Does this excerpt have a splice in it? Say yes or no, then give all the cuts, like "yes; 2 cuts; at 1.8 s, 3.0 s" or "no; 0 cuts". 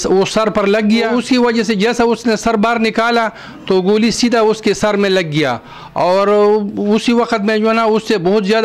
yes; 1 cut; at 1.1 s